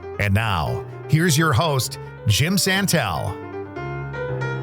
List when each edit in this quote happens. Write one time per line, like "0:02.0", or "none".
0:03.3